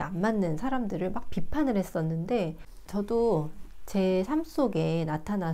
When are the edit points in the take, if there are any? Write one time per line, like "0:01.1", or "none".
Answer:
0:02.7

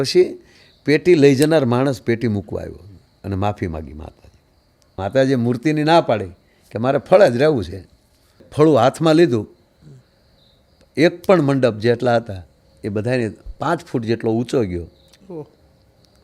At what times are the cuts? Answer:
0:05.0
0:08.5

